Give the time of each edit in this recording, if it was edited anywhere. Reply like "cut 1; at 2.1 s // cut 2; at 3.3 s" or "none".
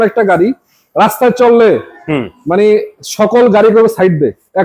none